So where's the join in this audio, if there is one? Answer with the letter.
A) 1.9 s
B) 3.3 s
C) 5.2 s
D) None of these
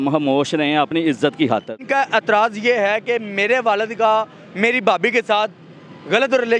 A